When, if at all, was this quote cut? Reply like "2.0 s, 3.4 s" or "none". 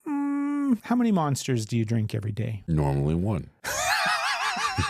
0.8 s, 2.5 s, 3.6 s